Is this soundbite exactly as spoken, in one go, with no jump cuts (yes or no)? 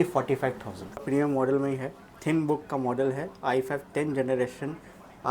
no